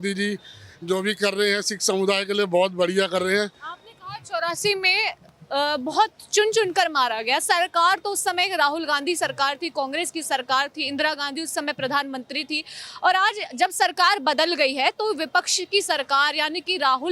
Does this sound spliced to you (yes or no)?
no